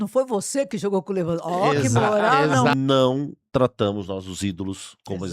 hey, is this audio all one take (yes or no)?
no